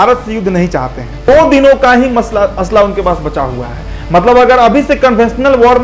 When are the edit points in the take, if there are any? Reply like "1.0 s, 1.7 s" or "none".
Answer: 1.3 s